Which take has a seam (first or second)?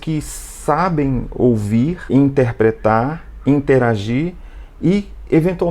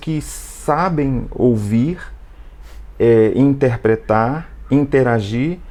first